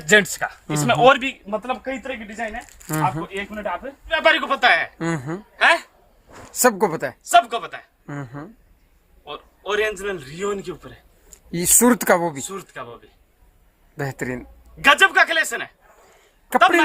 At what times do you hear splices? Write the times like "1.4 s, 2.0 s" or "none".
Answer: 4.2 s